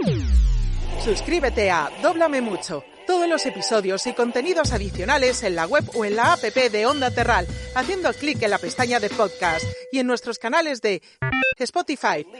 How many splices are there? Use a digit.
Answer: 1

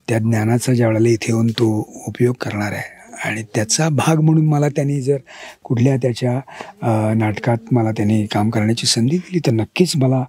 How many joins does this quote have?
0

